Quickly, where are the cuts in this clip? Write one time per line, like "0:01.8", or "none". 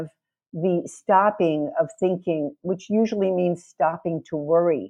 none

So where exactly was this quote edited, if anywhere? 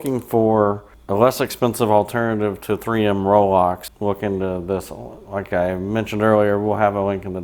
0:00.9
0:03.9

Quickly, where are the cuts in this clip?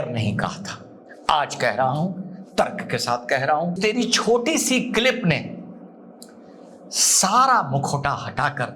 0:03.8

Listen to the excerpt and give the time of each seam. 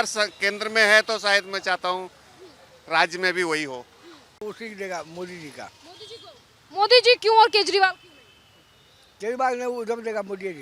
0:04.4

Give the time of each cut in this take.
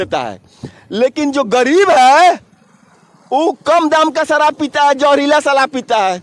none

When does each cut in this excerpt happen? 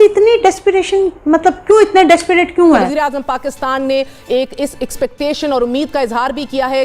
0:02.9

